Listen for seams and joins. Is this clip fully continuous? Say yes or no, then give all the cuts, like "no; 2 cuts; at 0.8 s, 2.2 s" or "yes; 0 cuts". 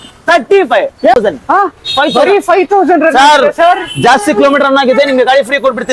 no; 1 cut; at 1.2 s